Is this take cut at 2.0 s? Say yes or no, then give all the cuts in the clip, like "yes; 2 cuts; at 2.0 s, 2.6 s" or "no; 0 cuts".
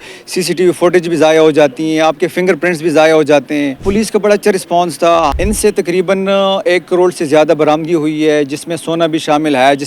no; 2 cuts; at 3.8 s, 5.3 s